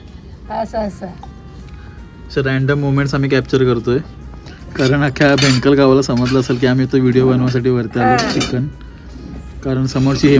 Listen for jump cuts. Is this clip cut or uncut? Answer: uncut